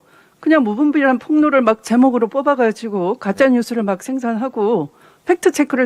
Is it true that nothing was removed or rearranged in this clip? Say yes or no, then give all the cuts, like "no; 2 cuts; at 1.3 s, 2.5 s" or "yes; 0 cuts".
yes; 0 cuts